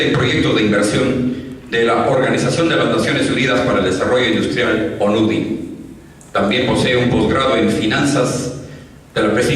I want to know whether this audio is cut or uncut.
cut